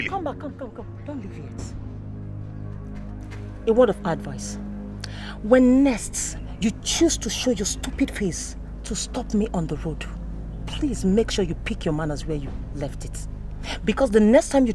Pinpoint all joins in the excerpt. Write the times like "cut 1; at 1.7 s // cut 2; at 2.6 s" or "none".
none